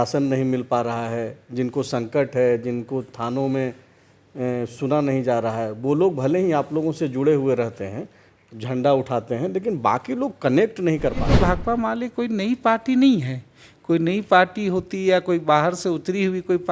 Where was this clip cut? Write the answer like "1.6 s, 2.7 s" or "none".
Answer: 11.3 s